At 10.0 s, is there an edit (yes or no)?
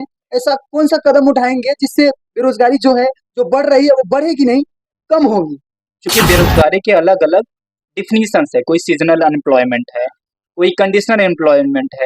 no